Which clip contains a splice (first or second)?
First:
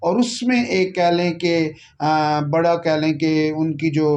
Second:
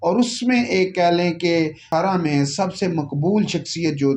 second